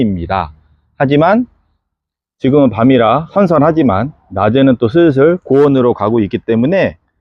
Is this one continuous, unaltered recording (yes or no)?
yes